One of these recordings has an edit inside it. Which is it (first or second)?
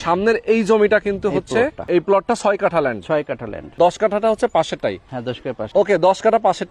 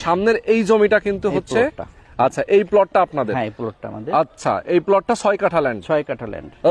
first